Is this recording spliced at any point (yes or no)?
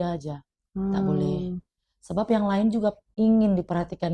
yes